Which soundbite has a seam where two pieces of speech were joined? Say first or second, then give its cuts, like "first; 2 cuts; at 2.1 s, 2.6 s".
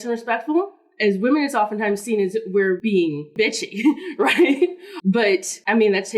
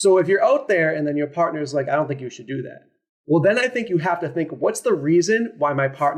first; 2 cuts; at 3.0 s, 5.1 s